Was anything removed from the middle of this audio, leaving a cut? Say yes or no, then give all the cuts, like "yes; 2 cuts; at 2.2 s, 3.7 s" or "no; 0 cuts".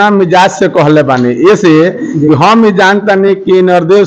no; 0 cuts